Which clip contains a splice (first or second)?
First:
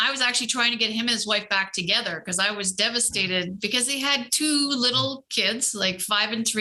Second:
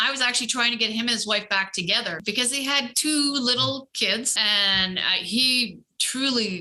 second